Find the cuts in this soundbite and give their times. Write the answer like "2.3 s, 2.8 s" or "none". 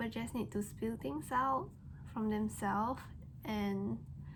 none